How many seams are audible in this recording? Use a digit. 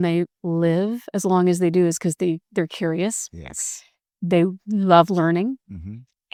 0